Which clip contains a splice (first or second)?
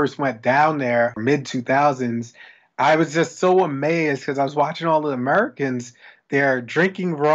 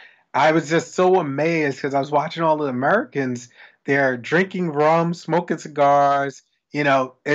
first